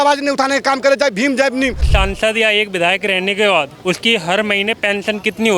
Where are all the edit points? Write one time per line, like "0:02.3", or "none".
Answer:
0:01.9
0:03.7

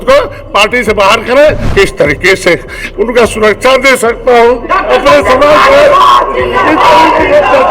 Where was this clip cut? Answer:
0:01.6

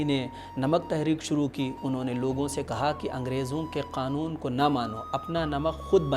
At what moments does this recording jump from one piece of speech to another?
none

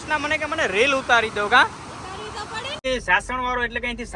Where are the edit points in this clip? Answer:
0:02.8

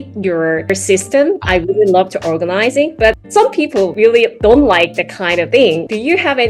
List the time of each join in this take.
0:04.1
0:05.5

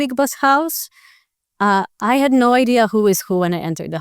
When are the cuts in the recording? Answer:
none

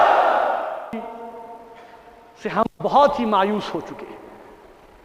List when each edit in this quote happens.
0:01.1

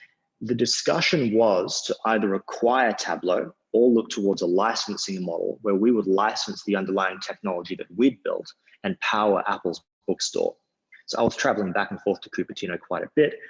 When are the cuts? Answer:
none

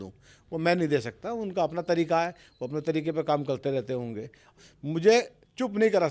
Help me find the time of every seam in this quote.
0:04.6

